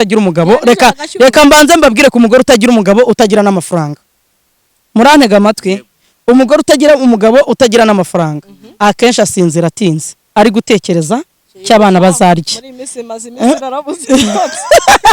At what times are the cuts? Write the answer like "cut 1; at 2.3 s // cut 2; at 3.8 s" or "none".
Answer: none